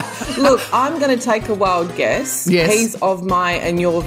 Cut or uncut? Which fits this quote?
cut